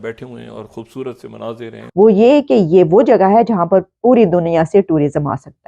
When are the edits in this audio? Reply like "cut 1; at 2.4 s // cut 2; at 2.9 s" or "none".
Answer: cut 1; at 1.8 s